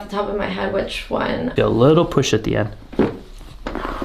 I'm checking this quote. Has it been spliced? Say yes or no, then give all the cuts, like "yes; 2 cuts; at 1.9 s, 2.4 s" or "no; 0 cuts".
yes; 1 cut; at 1.5 s